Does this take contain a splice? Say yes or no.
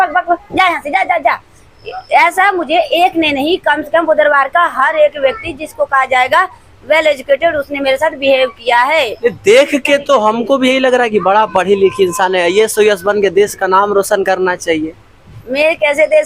no